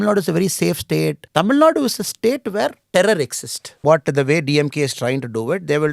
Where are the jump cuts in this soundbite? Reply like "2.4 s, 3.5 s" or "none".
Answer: 1.2 s, 2.8 s, 3.8 s